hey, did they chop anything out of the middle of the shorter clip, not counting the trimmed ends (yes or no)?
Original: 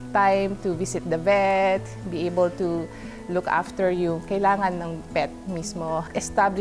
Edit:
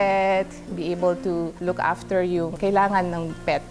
yes